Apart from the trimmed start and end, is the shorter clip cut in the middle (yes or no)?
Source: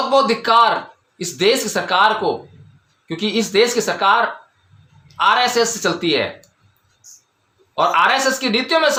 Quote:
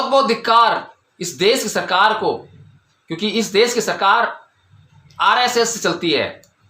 no